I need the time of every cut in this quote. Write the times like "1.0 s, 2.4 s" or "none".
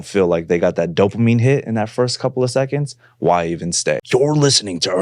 4.0 s